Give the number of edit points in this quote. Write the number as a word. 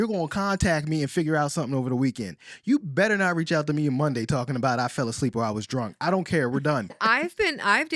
one